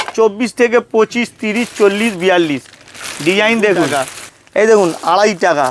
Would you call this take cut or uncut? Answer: cut